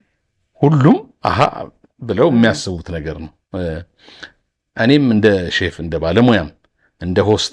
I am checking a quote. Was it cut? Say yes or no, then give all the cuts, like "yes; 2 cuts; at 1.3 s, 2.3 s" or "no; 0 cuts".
no; 0 cuts